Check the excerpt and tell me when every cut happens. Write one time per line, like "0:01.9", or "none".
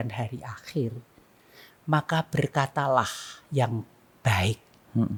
none